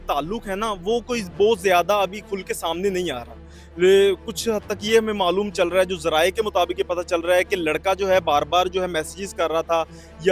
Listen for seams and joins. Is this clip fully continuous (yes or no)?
yes